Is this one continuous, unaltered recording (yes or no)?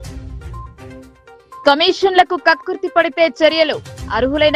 no